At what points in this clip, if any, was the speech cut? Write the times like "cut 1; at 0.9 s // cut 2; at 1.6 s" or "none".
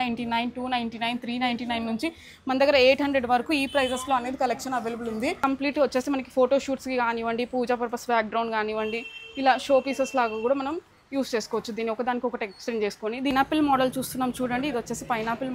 cut 1; at 5.4 s // cut 2; at 13.3 s